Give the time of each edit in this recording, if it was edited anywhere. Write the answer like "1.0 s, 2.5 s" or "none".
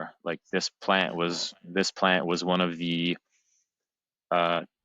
none